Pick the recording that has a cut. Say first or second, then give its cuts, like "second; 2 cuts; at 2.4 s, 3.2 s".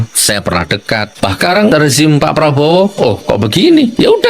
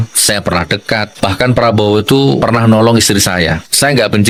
first; 1 cut; at 1.4 s